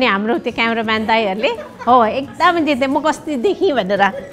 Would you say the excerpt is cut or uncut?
uncut